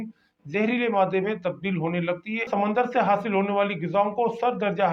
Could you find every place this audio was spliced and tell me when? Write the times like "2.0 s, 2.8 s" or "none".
2.5 s

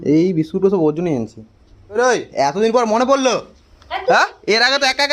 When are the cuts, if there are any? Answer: 2.0 s

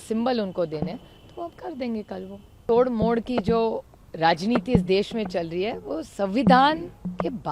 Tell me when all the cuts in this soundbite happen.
2.6 s

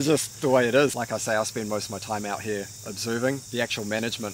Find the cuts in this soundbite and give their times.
0.9 s, 3.5 s

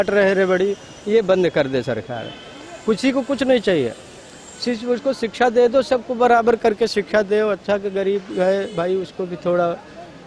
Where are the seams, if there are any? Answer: none

